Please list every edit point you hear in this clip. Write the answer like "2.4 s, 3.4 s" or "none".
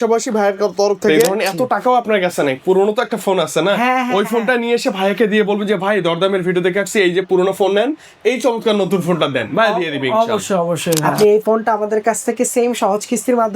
1.3 s, 11.1 s